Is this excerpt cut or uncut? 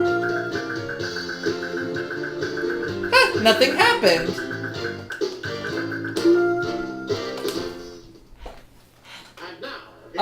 cut